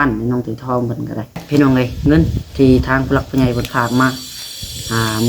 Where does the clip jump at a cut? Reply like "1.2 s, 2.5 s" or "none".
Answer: 1.4 s